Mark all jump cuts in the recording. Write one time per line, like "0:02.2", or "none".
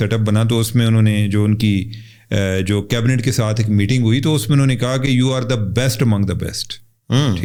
none